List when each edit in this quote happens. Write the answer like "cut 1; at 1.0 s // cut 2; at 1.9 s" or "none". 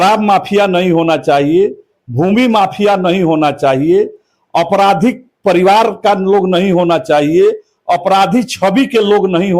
none